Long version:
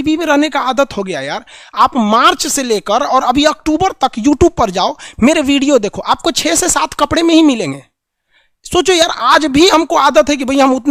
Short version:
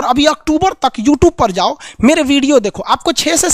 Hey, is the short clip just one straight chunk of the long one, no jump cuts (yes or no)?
yes